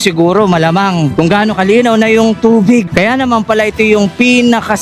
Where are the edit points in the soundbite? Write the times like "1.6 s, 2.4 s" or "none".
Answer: 1.1 s, 2.9 s